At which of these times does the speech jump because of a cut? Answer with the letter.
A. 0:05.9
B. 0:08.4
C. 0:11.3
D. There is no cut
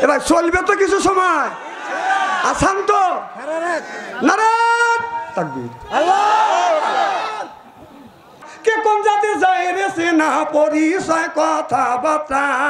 B